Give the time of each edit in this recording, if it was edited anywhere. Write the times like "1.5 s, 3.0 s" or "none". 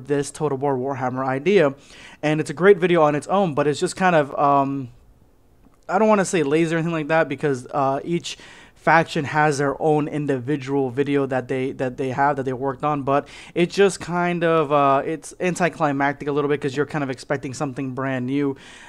6.6 s